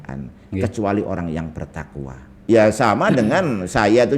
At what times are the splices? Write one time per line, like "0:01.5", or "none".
0:02.3